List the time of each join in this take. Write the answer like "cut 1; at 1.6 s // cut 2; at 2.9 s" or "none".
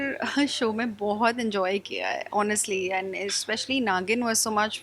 none